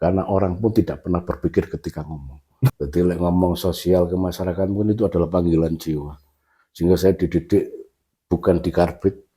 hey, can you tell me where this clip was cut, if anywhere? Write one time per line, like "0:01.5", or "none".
0:02.7